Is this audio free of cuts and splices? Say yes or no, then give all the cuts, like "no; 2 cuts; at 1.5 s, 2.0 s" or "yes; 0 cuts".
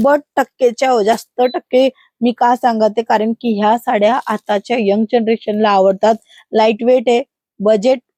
yes; 0 cuts